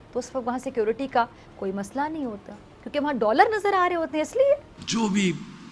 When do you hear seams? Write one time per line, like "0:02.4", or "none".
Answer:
0:04.8